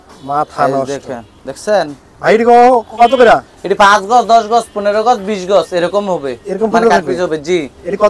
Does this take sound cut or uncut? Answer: uncut